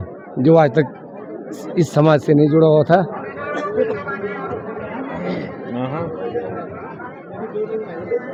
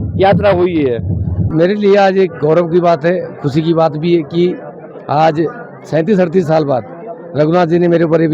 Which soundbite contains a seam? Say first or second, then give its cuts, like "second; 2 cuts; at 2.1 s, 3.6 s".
second; 1 cut; at 1.5 s